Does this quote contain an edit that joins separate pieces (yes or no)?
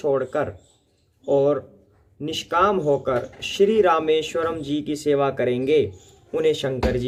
no